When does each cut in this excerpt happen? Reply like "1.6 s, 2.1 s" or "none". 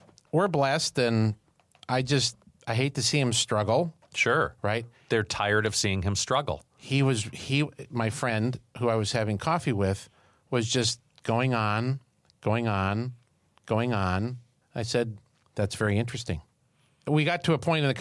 4.0 s, 16.5 s